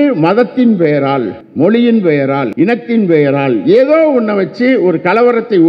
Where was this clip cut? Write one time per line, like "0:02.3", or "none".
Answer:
0:01.4
0:02.5

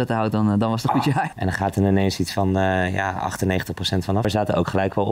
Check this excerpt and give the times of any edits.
0:01.3
0:04.2

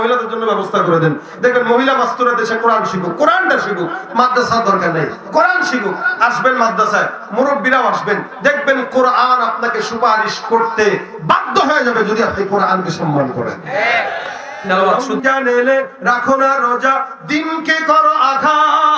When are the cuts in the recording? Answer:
0:14.9

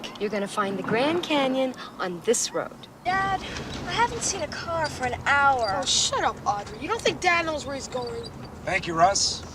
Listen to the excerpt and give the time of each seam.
0:02.8

